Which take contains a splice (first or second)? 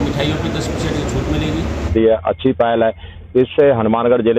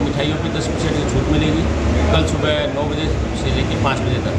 first